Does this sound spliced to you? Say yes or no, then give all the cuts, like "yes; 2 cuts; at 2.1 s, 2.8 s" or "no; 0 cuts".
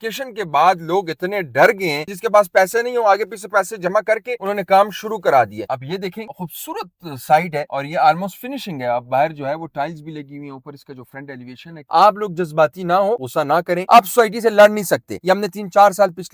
yes; 5 cuts; at 2.1 s, 5.6 s, 7.7 s, 11.8 s, 13.8 s